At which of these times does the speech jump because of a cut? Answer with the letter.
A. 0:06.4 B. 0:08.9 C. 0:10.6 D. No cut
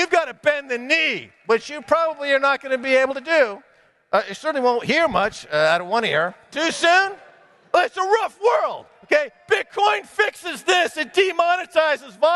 A